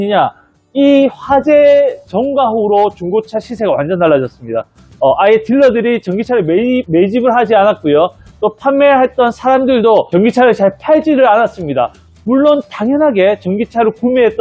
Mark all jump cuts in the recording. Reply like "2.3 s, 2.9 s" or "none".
none